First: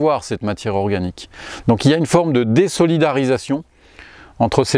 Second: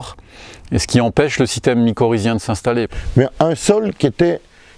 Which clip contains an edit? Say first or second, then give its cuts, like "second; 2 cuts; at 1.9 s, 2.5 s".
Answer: second; 1 cut; at 3.0 s